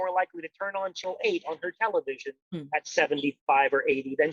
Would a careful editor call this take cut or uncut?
cut